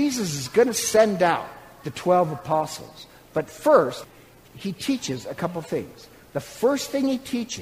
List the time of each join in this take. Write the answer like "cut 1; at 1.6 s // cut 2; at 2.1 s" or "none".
cut 1; at 4.0 s